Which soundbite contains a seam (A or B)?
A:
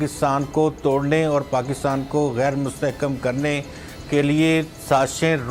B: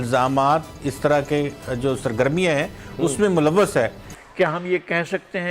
B